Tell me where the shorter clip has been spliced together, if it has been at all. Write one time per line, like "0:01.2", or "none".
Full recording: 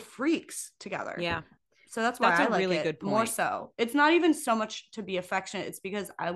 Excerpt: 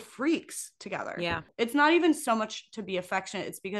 0:01.5